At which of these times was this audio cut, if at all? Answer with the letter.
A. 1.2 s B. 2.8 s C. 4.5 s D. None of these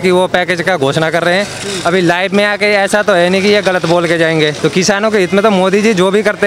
C